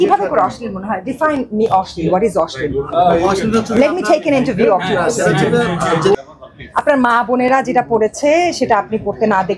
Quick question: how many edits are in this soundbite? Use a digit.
1